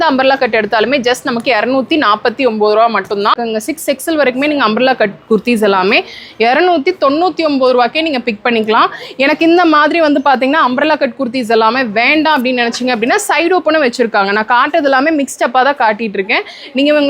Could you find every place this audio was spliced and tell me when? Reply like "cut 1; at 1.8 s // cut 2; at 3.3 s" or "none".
cut 1; at 3.4 s